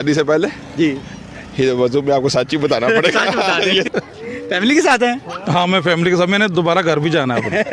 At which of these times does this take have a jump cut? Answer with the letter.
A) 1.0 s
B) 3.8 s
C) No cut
B